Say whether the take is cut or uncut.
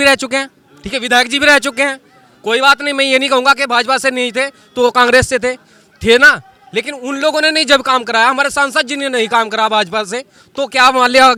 uncut